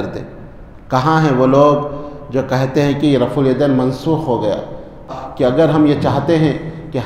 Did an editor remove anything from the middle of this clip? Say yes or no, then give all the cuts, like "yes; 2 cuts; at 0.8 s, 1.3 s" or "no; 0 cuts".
yes; 1 cut; at 5.1 s